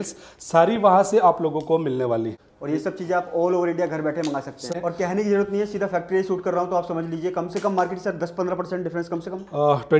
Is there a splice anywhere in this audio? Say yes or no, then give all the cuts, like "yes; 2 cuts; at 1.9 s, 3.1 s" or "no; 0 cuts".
yes; 2 cuts; at 2.4 s, 4.7 s